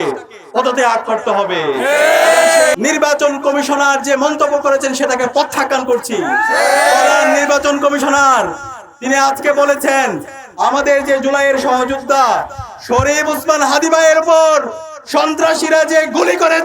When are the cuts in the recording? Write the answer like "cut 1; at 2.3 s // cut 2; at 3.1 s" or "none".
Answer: cut 1; at 2.7 s